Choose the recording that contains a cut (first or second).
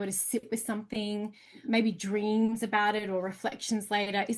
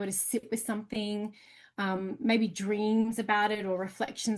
first